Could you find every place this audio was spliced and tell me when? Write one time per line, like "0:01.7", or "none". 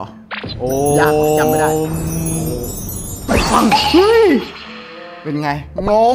none